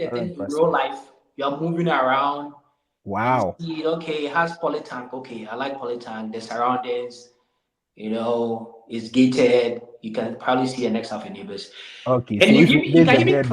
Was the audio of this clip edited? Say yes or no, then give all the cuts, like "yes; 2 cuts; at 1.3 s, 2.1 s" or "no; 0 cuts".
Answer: no; 0 cuts